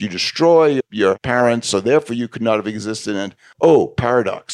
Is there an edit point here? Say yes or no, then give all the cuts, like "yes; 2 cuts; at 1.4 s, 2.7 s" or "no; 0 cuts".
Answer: yes; 1 cut; at 3.4 s